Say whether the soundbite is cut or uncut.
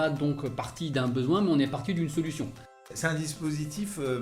cut